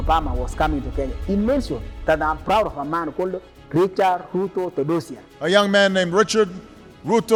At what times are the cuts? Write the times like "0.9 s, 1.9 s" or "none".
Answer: none